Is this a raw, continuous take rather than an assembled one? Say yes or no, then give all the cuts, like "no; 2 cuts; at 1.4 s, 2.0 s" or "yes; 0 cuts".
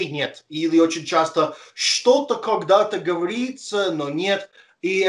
yes; 0 cuts